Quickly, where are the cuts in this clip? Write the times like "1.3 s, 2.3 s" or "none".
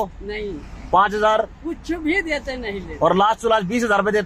none